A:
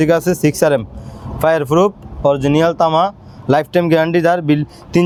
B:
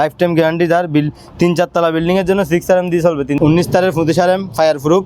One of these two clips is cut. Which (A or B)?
B